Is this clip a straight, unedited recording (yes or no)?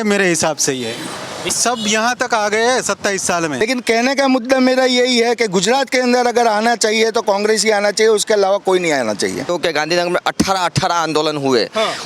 no